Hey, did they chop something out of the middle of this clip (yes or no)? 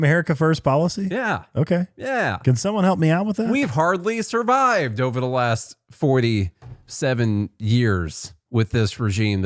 no